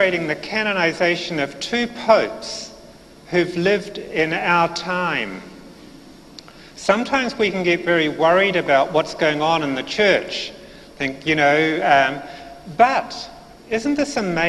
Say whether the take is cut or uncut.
cut